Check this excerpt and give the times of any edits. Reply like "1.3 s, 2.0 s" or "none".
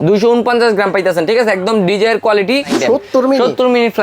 2.8 s